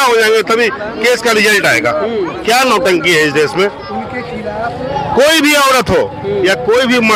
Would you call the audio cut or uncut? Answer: uncut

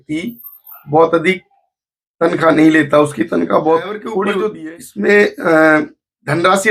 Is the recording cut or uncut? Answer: cut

